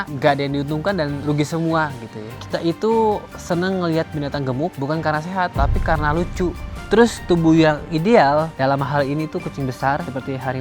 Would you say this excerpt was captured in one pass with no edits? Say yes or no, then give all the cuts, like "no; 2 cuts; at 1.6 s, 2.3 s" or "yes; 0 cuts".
no; 2 cuts; at 2.3 s, 6.7 s